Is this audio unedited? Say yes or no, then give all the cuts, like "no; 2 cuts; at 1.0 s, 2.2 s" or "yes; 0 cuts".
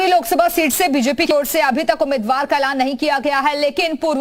no; 1 cut; at 1.3 s